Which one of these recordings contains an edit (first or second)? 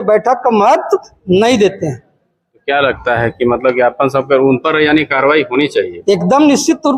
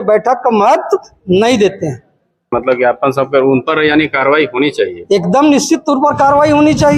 second